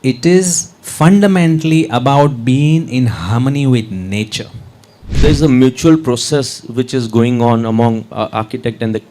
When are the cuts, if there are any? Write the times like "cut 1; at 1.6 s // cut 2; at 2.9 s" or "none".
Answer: cut 1; at 5.1 s